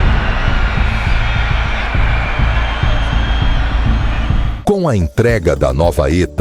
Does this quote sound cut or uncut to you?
cut